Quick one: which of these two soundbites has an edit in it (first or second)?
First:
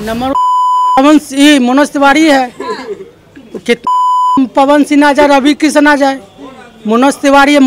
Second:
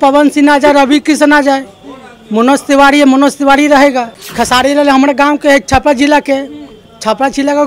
second